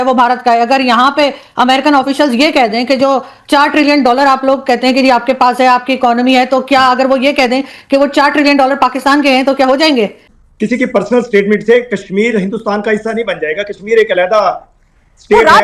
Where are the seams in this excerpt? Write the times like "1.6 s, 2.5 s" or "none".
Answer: 10.4 s